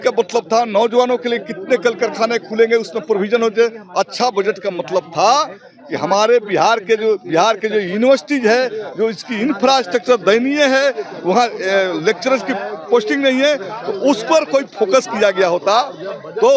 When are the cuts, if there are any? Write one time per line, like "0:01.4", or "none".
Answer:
none